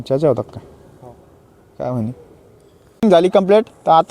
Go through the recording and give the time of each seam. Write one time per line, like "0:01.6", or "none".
0:03.0

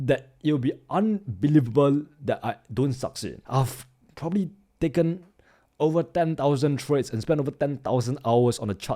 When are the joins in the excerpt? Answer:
0:03.4

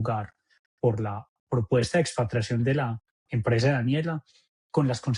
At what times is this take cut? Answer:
none

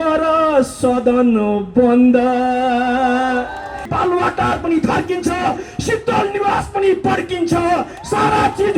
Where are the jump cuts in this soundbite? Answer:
0:03.9

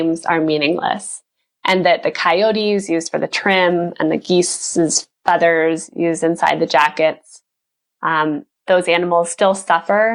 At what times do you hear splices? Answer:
none

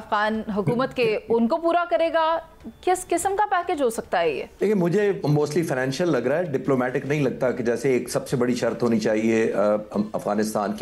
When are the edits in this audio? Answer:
none

